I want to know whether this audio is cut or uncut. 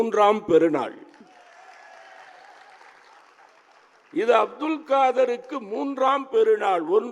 uncut